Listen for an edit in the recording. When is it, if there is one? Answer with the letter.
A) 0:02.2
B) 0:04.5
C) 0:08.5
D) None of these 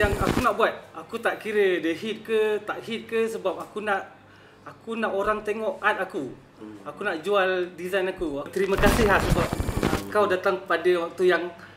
C